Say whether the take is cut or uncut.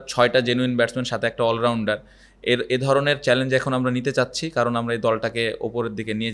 uncut